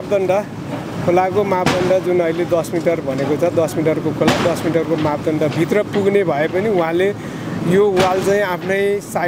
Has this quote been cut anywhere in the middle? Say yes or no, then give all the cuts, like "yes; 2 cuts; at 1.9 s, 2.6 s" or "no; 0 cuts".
no; 0 cuts